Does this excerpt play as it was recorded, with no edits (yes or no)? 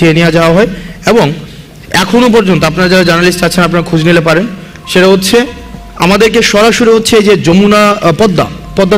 yes